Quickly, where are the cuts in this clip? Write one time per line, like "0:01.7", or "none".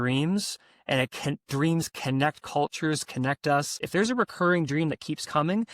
0:03.8